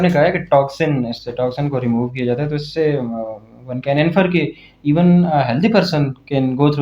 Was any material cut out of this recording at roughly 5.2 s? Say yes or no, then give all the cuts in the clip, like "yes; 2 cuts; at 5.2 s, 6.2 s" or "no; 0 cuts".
no; 0 cuts